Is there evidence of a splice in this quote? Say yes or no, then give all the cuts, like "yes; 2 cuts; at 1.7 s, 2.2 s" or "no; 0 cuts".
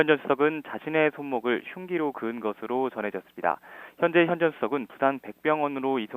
yes; 1 cut; at 1.4 s